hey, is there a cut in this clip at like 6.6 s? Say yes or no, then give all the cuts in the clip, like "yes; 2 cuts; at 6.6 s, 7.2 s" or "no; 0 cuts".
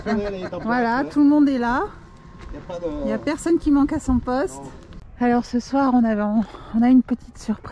no; 1 cut; at 5.0 s